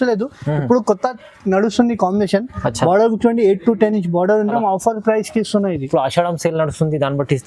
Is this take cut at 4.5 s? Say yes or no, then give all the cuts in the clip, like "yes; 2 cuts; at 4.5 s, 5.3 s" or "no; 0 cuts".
yes; 1 cut; at 4.5 s